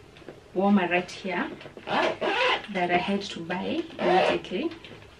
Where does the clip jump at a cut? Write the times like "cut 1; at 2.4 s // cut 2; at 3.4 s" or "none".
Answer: none